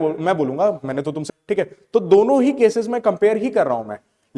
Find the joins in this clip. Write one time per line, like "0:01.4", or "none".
0:01.2